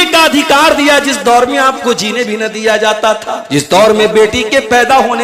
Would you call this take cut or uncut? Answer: cut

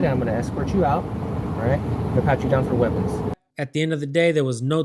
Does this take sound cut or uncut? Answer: cut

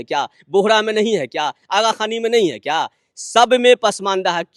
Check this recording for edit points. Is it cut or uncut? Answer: uncut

